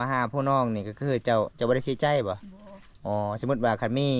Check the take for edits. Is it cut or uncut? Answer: uncut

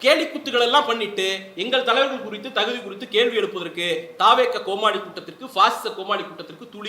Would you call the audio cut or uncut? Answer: uncut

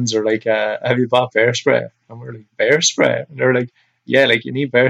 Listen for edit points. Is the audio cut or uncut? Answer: uncut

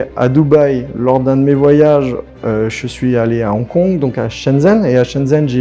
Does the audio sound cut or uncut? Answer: uncut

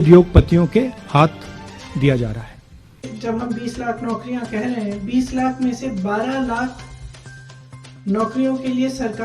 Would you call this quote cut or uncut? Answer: cut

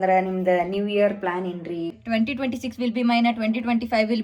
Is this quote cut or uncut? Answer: cut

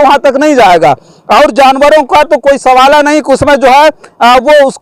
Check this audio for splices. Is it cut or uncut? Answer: uncut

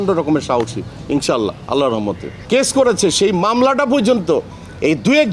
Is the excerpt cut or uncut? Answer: uncut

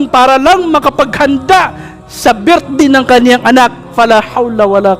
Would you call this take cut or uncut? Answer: uncut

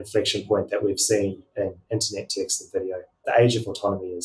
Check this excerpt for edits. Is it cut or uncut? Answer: cut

